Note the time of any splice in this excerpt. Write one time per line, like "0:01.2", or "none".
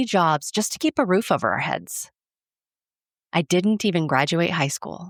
none